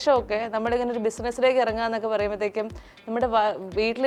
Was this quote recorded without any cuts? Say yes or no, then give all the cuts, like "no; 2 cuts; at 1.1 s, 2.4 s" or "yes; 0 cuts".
yes; 0 cuts